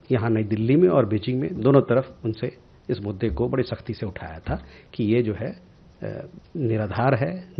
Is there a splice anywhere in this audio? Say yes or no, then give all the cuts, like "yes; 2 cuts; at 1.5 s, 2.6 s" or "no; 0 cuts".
no; 0 cuts